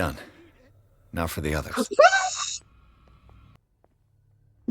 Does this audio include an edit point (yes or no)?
yes